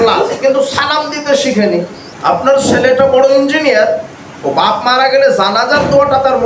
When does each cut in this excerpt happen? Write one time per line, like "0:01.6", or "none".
0:02.0